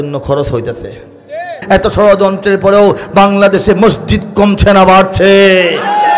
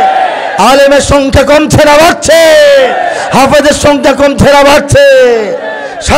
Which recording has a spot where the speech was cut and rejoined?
first; 1 cut; at 1.6 s

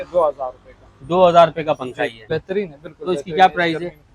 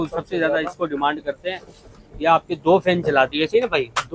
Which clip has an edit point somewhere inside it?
first; 1 cut; at 2.2 s

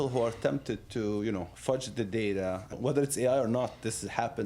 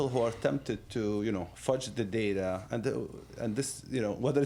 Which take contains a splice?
first; 1 cut; at 2.7 s

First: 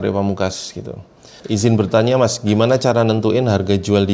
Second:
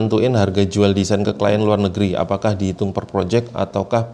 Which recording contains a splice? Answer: first; 1 cut; at 1.3 s

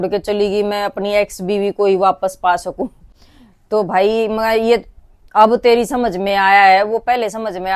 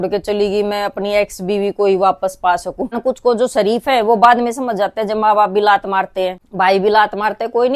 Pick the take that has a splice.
second; 2 cuts; at 3.0 s, 6.4 s

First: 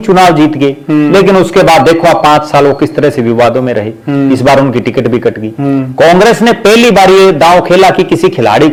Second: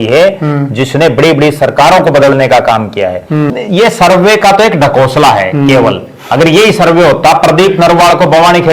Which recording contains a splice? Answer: second; 1 cut; at 3.5 s

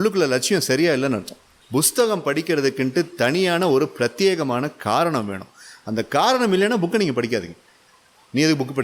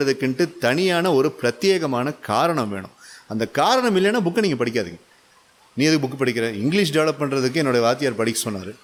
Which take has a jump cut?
first; 1 cut; at 1.6 s

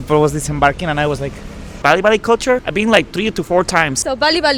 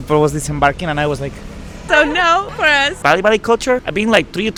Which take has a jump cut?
first; 1 cut; at 1.7 s

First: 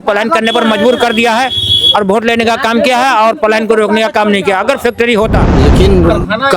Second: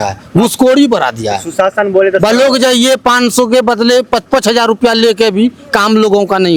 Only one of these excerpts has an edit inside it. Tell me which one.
first; 1 cut; at 5.5 s

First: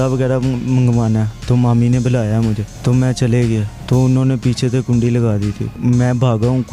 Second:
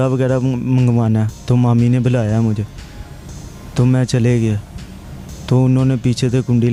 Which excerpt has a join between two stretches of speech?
first; 3 cuts; at 2.7 s, 3.7 s, 5.8 s

